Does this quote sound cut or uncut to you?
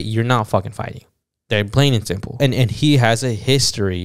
cut